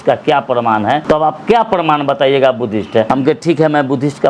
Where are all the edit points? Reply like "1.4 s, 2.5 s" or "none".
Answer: 1.0 s, 3.1 s